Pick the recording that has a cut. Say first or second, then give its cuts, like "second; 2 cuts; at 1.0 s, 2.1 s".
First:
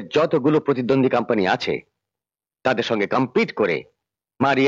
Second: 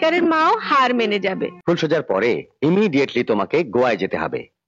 second; 1 cut; at 1.5 s